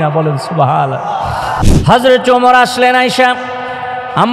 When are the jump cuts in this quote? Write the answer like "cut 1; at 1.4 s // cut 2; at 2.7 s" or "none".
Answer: cut 1; at 1.6 s